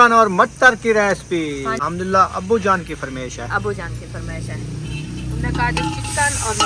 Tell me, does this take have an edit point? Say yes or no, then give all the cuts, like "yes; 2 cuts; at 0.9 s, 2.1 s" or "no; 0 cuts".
yes; 1 cut; at 1.8 s